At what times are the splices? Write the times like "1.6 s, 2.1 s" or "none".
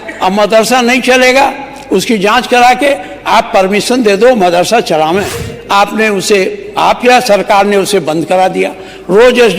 5.4 s